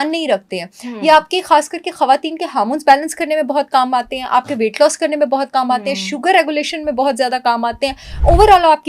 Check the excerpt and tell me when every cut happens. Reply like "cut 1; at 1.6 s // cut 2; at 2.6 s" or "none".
none